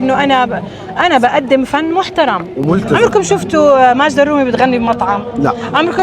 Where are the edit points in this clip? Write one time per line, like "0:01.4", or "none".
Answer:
0:02.9